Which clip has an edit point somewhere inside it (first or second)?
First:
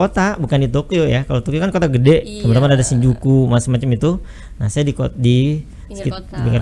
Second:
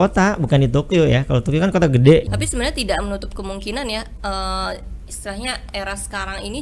second